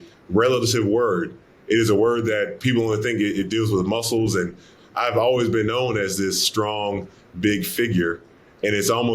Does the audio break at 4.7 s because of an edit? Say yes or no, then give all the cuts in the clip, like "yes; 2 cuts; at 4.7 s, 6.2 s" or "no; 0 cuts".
yes; 1 cut; at 4.7 s